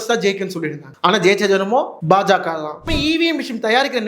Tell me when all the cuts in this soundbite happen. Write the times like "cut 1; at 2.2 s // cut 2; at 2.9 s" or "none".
cut 1; at 2.9 s